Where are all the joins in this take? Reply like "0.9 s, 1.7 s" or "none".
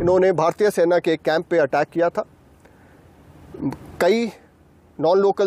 none